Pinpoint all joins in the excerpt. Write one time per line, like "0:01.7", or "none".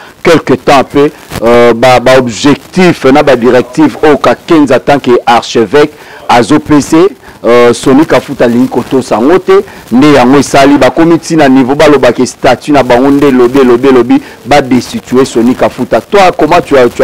none